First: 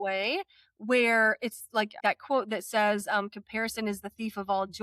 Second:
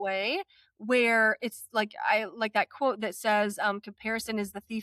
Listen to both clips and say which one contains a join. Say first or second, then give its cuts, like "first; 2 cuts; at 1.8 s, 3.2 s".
first; 1 cut; at 2.0 s